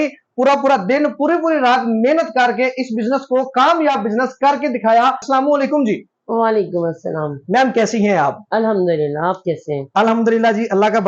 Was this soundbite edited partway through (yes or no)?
no